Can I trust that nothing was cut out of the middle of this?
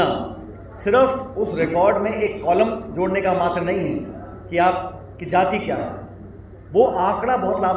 yes; 0 cuts

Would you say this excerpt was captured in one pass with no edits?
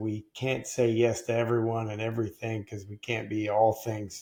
yes; 0 cuts

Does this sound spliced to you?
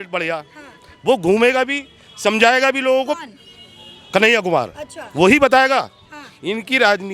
no; 0 cuts

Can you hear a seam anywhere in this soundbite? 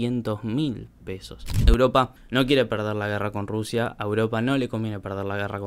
yes; 1 cut; at 1.5 s

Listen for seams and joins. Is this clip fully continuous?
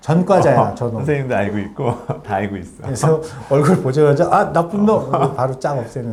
yes; 0 cuts

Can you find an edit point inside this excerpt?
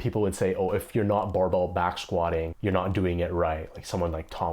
yes; 1 cut; at 2.5 s

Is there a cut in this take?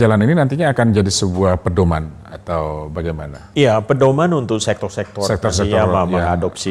yes; 1 cut; at 3.4 s

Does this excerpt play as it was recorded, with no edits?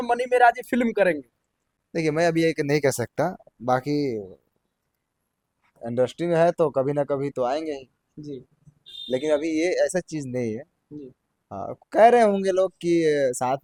yes; 0 cuts

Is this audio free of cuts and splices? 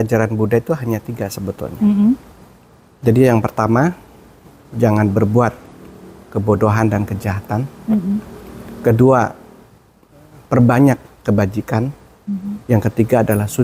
yes; 0 cuts

